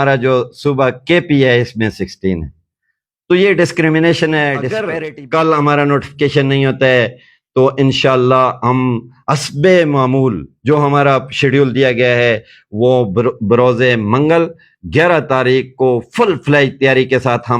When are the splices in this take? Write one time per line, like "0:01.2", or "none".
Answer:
0:04.9